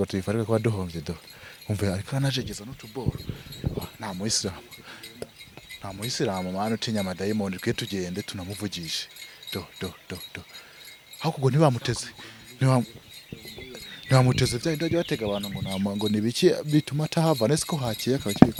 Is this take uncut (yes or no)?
yes